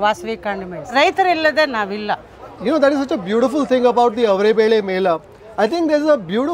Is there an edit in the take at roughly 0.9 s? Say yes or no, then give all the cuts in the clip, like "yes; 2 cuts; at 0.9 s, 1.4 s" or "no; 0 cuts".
yes; 1 cut; at 0.9 s